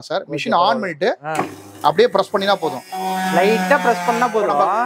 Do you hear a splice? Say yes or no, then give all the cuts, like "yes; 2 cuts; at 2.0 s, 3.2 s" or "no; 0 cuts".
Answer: no; 0 cuts